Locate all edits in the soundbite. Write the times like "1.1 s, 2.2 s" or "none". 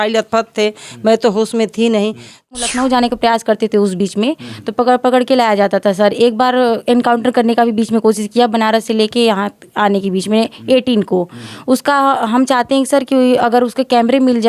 2.5 s